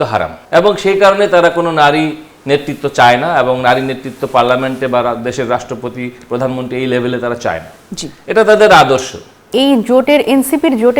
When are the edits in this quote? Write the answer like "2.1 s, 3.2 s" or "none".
9.5 s